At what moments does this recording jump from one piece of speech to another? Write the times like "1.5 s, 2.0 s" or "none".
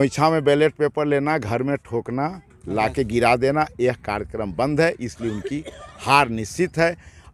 none